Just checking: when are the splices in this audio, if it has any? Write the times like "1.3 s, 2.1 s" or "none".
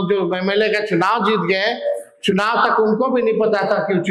none

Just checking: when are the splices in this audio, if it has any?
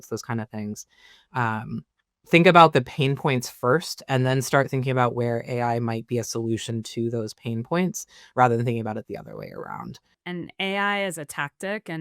10.2 s

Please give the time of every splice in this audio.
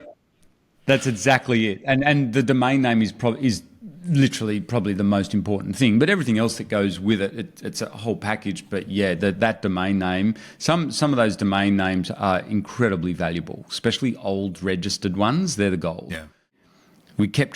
16.6 s

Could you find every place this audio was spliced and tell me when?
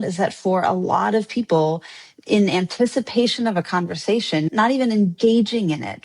4.5 s

